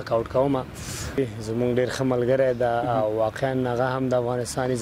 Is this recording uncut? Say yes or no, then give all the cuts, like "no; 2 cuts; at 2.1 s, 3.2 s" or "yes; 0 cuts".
no; 1 cut; at 1.2 s